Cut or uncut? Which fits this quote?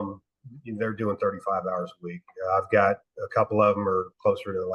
uncut